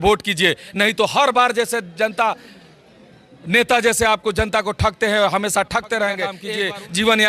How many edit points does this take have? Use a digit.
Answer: 1